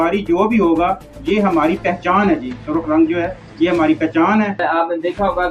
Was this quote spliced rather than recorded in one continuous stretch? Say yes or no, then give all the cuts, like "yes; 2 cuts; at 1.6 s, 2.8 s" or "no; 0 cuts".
yes; 1 cut; at 4.6 s